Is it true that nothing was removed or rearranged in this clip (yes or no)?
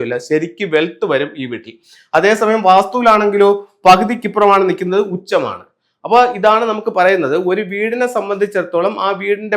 yes